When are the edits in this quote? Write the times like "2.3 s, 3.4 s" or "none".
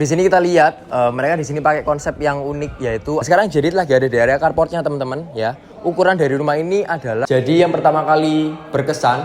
3.2 s, 7.2 s